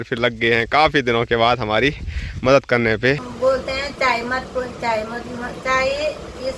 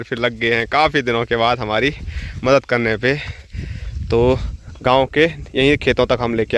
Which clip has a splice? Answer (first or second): first